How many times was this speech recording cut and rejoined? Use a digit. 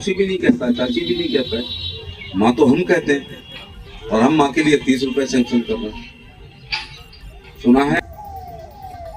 1